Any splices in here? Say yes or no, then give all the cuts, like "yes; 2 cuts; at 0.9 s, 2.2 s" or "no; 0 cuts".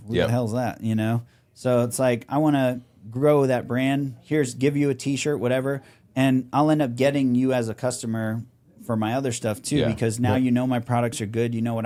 no; 0 cuts